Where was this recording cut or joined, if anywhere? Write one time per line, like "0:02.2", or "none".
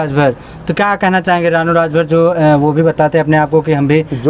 none